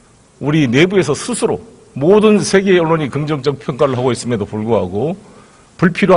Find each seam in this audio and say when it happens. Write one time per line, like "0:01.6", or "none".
none

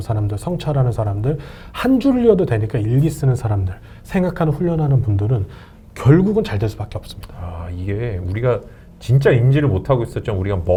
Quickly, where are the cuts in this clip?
none

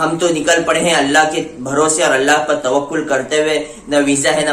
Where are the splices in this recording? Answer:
none

